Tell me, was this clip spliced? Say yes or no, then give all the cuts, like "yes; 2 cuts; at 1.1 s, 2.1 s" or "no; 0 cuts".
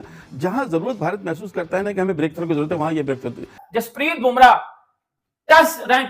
yes; 1 cut; at 3.6 s